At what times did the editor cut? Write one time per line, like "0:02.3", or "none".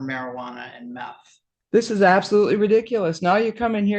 0:01.7